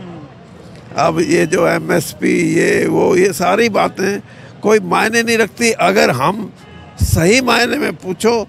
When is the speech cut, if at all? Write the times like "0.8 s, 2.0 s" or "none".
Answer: none